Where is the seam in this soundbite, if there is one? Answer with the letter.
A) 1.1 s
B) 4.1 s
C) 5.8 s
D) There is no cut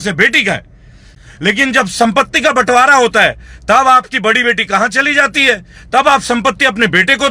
A